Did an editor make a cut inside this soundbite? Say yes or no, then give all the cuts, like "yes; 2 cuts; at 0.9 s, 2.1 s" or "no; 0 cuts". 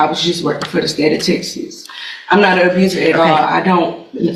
no; 0 cuts